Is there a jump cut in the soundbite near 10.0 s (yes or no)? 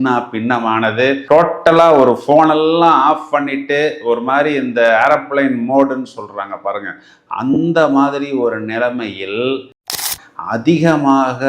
yes